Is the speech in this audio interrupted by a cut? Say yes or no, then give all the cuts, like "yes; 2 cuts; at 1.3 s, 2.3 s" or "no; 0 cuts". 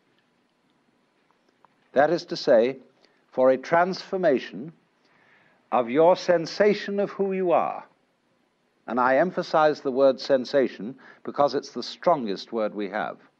no; 0 cuts